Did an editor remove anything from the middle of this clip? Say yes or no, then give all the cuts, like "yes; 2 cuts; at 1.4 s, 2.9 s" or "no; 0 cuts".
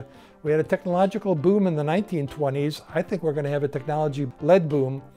yes; 1 cut; at 4.2 s